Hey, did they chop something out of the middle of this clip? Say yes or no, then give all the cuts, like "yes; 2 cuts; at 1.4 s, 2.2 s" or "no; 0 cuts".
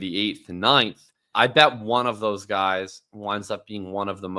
yes; 1 cut; at 1.3 s